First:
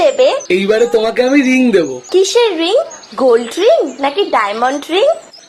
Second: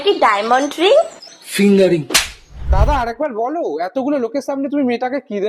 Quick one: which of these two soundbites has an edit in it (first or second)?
second